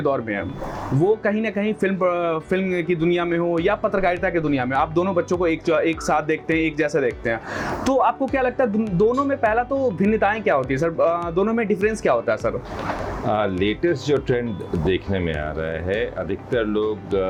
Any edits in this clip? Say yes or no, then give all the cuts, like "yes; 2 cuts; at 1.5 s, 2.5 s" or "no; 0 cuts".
no; 0 cuts